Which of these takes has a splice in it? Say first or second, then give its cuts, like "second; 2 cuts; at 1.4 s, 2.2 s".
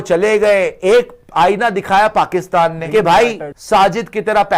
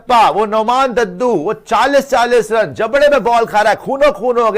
first; 2 cuts; at 2.8 s, 3.5 s